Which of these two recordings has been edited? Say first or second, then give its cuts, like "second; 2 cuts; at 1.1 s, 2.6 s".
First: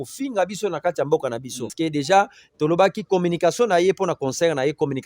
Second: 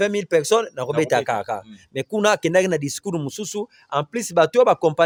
first; 1 cut; at 1.7 s